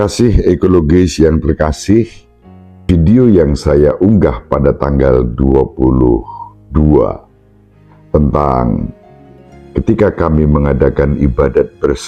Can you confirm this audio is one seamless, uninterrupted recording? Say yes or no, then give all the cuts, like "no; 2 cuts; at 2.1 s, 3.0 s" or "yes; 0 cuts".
yes; 0 cuts